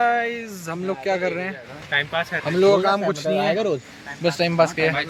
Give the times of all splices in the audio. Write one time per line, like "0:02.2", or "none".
none